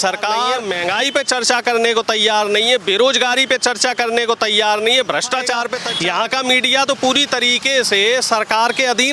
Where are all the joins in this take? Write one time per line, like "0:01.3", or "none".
0:05.8